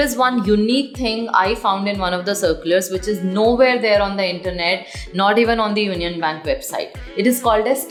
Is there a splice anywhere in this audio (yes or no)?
no